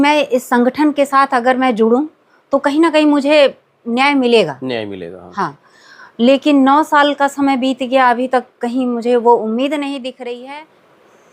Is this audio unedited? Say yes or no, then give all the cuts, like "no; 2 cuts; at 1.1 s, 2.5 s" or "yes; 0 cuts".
no; 1 cut; at 10.4 s